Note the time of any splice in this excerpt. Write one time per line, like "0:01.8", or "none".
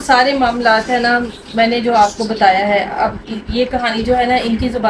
none